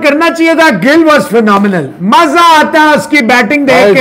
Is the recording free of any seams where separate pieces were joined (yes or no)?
yes